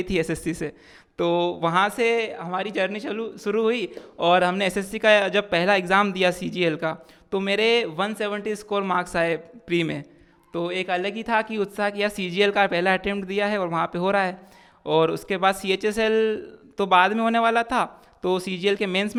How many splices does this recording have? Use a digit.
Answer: 0